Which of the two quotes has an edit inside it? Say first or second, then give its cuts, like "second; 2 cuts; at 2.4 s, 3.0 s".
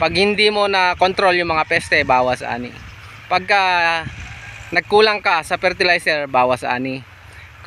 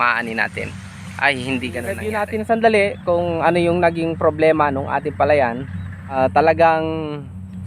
second; 2 cuts; at 2.0 s, 5.7 s